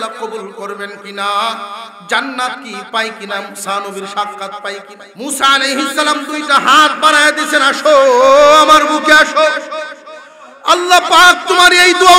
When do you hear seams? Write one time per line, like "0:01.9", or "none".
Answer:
0:05.0

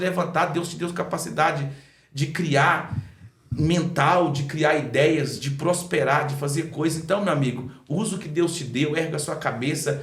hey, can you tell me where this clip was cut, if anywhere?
none

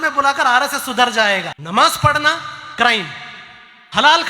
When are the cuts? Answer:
0:01.6

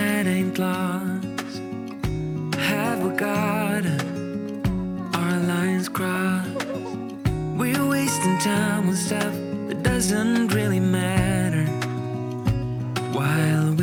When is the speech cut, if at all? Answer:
none

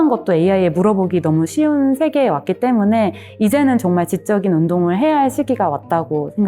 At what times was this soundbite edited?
none

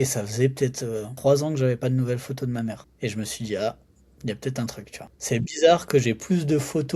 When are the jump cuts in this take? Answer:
0:01.1
0:02.9
0:05.2

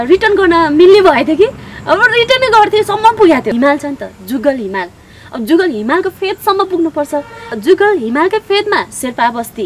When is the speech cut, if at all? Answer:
0:03.5
0:07.5

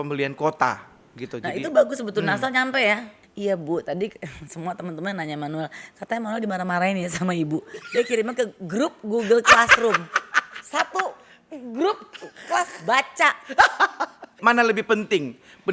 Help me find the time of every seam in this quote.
0:03.2
0:14.4

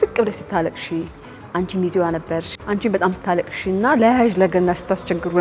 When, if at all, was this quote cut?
0:02.5

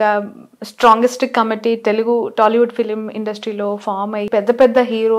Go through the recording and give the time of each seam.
0:04.3

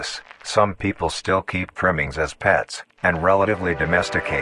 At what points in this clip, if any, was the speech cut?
none

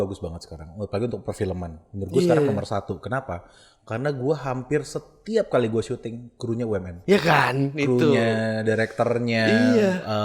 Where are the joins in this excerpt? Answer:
none

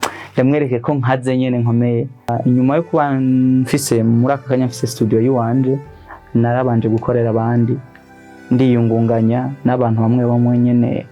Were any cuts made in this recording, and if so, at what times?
0:02.3

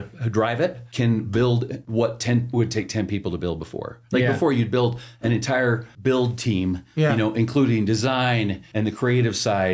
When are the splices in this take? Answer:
0:00.8
0:01.8
0:05.9
0:08.6

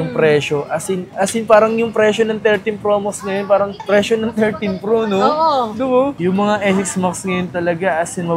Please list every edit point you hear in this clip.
0:01.1
0:06.1

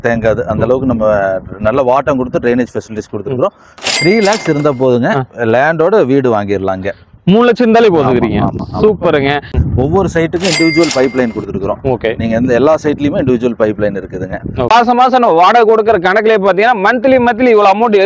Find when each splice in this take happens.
0:03.9
0:09.5
0:14.7

